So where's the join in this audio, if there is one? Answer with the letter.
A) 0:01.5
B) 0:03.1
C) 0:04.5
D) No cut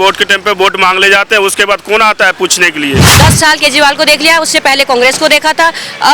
B